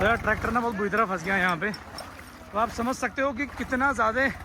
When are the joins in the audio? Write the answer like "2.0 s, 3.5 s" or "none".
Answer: none